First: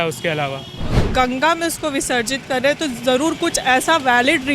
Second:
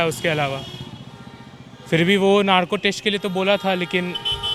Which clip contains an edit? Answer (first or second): first